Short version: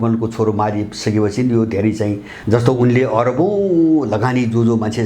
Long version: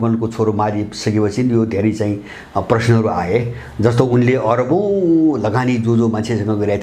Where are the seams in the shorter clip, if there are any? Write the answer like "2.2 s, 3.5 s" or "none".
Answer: 2.3 s